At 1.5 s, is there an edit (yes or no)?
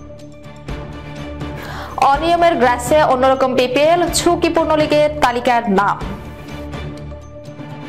yes